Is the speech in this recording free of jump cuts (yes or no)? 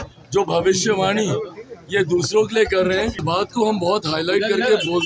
no